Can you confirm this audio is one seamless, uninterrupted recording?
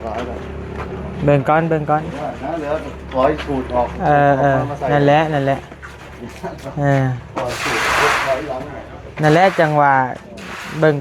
yes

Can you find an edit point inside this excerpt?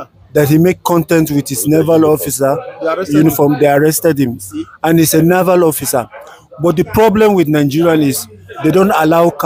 no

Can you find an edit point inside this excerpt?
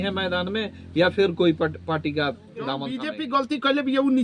yes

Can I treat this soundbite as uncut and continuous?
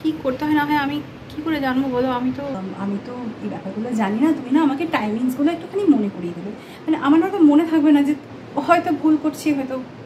no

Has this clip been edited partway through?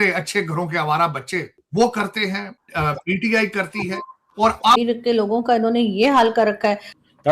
yes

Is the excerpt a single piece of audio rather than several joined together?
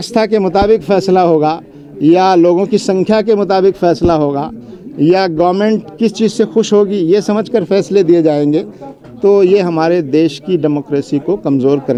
yes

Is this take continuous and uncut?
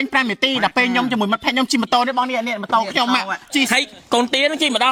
yes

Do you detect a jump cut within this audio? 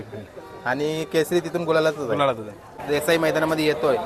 yes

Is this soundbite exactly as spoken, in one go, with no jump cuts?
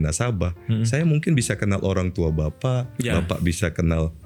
yes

